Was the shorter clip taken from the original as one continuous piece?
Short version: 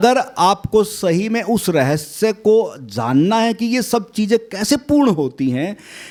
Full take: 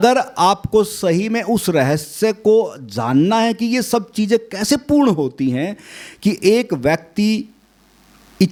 yes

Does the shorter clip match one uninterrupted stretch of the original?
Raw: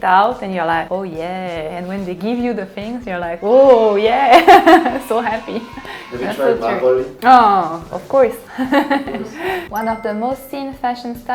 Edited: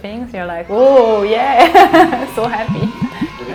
yes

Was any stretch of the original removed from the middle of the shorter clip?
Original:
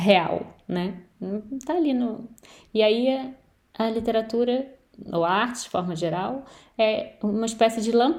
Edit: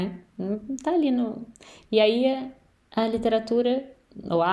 no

